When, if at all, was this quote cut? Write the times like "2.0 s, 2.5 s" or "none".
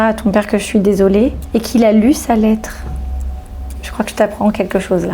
1.4 s